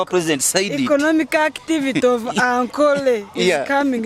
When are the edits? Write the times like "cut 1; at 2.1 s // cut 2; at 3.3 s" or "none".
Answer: none